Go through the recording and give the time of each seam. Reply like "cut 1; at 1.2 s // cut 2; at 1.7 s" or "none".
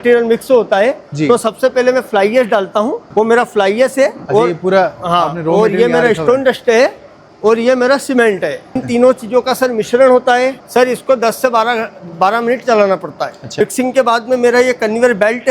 cut 1; at 8.8 s // cut 2; at 10.6 s // cut 3; at 13.6 s